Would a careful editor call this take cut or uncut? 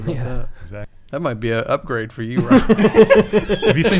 cut